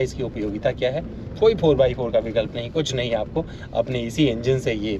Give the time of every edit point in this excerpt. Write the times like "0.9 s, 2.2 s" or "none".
none